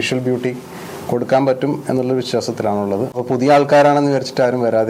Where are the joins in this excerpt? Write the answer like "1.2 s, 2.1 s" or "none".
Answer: none